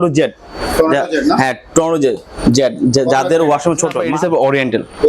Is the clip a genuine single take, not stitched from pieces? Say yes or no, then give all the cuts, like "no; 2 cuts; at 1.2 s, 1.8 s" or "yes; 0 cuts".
no; 1 cut; at 4.1 s